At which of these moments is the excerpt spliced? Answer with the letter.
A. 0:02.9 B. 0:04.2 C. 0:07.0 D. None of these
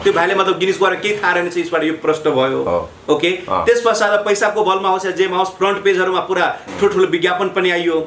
D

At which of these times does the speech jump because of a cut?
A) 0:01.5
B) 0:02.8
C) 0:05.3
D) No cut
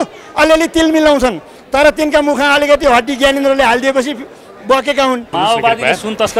C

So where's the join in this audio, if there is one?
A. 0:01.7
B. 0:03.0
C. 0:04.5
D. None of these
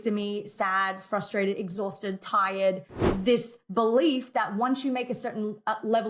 B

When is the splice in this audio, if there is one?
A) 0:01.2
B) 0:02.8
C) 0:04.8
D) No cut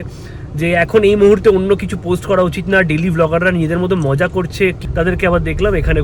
C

